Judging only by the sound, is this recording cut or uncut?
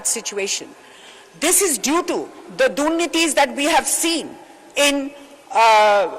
uncut